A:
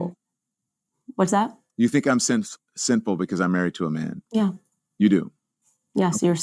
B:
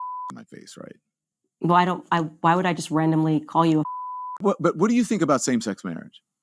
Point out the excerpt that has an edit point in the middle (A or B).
B